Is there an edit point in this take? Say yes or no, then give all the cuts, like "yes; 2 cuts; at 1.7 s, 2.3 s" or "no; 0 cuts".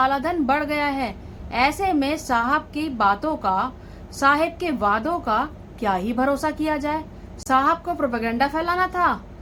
no; 0 cuts